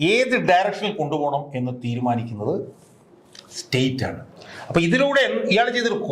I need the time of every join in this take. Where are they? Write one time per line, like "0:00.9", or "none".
0:04.3